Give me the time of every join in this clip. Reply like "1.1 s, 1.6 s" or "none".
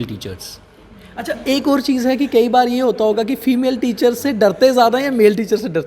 none

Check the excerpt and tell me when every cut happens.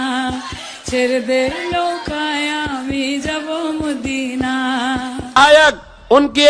5.4 s

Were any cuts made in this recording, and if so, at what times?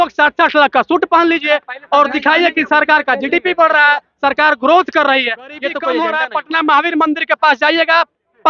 5.9 s

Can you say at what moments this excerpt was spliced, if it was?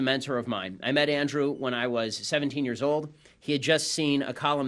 3.4 s

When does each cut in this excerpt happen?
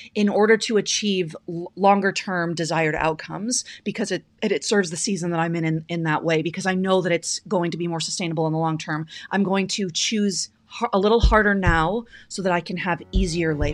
none

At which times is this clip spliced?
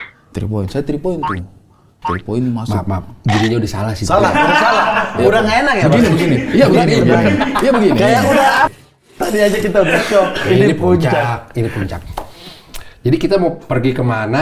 8.7 s

